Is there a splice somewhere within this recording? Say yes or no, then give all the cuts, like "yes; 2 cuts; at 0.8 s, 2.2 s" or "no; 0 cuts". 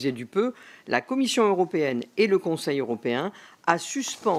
no; 0 cuts